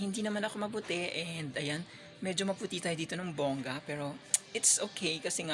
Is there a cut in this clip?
no; 0 cuts

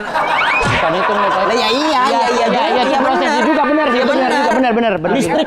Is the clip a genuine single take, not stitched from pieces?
yes; 0 cuts

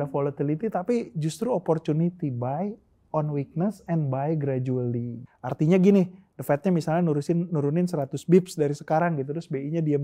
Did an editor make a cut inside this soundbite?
yes; 1 cut; at 5.3 s

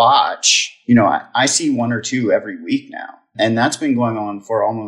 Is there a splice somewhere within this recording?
no; 0 cuts

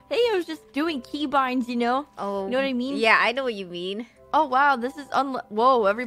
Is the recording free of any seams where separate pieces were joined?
no; 1 cut; at 2.1 s

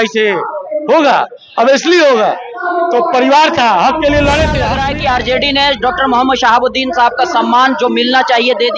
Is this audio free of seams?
no; 1 cut; at 4.9 s

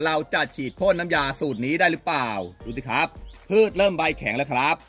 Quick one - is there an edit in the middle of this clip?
no; 0 cuts

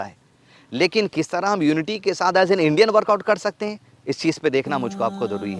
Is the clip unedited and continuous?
yes; 0 cuts

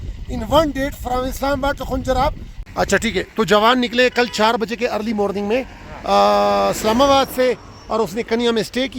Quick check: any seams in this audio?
yes; 1 cut; at 2.5 s

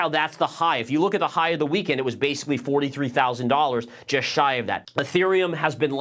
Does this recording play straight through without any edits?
no; 1 cut; at 4.8 s

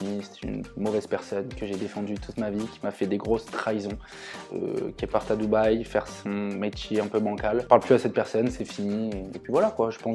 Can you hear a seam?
yes; 1 cut; at 7.7 s

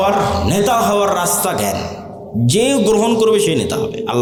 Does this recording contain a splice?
no; 0 cuts

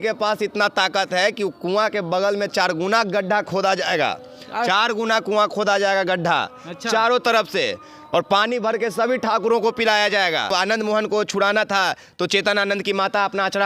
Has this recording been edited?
yes; 1 cut; at 10.4 s

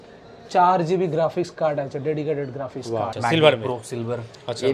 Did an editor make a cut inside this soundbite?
yes; 1 cut; at 3.1 s

